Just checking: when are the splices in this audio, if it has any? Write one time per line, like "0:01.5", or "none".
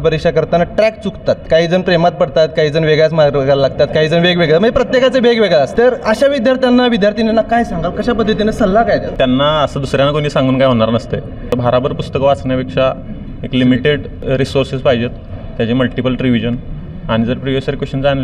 0:01.4
0:05.7
0:09.1
0:11.4
0:14.1